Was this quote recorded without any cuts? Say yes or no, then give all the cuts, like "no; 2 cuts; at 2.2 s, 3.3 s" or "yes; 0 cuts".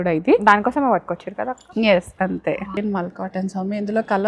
no; 1 cut; at 2.8 s